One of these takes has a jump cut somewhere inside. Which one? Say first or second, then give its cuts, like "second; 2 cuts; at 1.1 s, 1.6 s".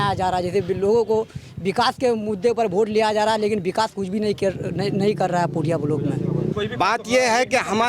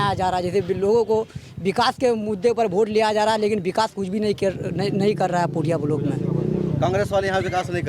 first; 1 cut; at 6.5 s